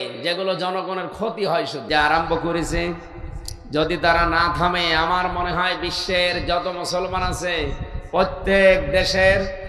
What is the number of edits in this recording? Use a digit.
1